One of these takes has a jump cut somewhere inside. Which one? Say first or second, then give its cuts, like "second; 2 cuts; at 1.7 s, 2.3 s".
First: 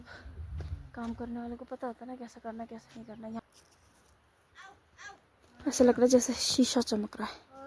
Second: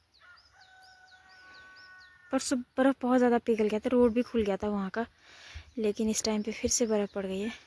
first; 1 cut; at 3.4 s